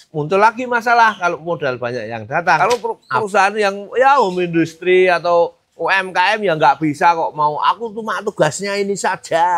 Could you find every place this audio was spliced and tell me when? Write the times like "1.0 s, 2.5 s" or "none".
2.6 s